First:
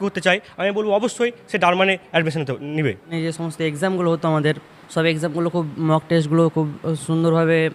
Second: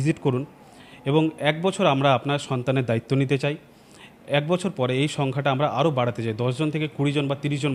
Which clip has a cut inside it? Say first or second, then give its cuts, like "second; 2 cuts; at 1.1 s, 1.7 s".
first; 2 cuts; at 3.1 s, 4.7 s